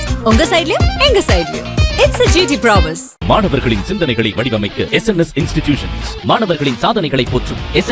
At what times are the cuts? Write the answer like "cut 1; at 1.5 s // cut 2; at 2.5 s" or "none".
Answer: none